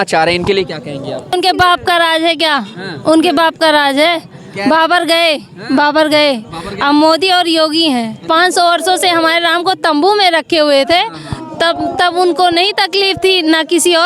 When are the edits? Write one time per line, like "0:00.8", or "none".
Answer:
0:01.3
0:08.2